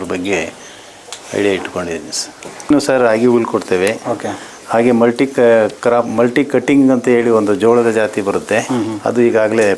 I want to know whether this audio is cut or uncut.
cut